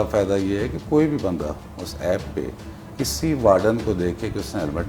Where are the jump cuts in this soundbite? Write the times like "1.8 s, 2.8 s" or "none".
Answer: none